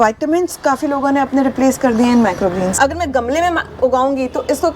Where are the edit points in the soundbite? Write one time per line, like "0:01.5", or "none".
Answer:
0:02.7